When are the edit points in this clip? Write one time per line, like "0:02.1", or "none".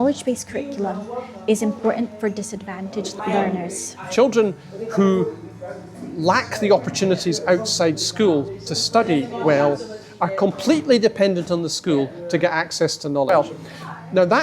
0:03.1
0:04.0
0:13.3